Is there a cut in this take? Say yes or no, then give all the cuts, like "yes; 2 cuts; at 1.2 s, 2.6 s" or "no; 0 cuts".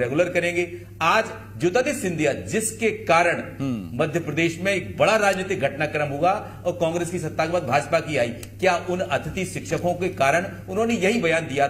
no; 0 cuts